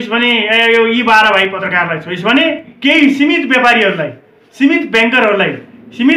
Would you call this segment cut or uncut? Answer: cut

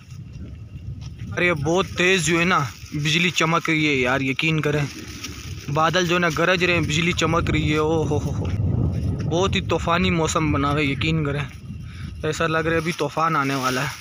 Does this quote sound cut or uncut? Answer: cut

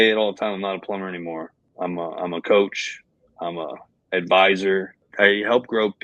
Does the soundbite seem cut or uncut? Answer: cut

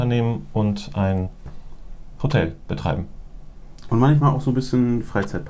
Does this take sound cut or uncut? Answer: uncut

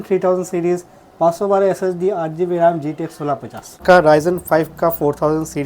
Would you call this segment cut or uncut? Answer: cut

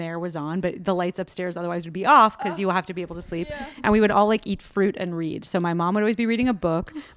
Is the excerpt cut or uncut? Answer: uncut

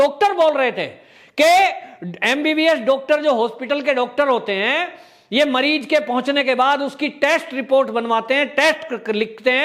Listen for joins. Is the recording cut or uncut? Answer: uncut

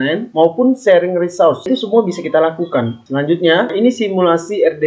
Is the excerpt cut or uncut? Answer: uncut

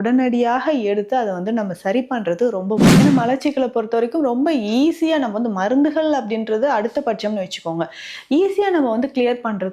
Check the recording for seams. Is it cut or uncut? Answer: cut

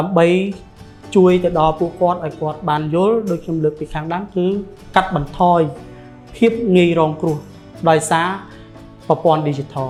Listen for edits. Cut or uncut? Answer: uncut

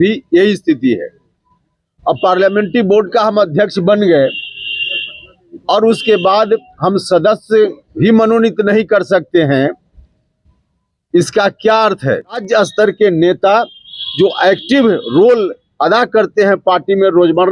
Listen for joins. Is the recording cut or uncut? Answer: cut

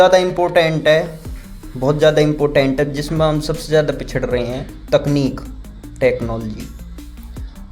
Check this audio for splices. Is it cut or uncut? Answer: uncut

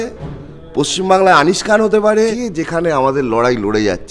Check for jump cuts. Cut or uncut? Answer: cut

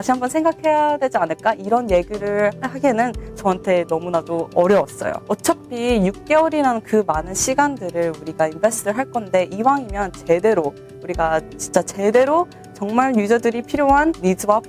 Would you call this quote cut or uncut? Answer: uncut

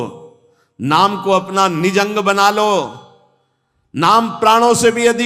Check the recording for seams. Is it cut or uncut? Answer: uncut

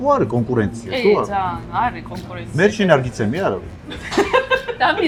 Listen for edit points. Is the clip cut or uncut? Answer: uncut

